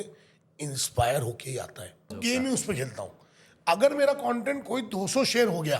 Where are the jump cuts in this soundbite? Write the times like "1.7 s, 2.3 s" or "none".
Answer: 2.1 s